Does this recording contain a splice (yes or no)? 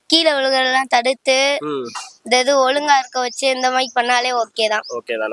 no